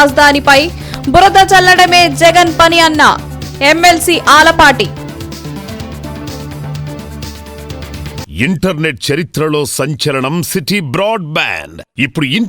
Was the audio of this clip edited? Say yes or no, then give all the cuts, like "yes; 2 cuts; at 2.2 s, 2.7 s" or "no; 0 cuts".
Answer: yes; 1 cut; at 8.2 s